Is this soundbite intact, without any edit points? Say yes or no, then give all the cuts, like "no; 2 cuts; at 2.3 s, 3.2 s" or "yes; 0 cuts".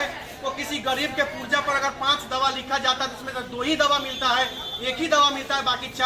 yes; 0 cuts